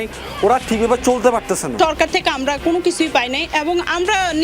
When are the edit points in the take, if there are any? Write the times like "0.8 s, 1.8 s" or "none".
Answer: 1.8 s